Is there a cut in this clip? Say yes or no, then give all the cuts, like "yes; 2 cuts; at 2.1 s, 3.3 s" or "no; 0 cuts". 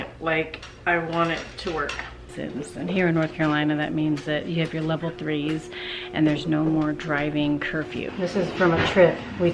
yes; 2 cuts; at 2.3 s, 8.1 s